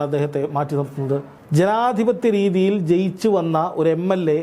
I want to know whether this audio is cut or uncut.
cut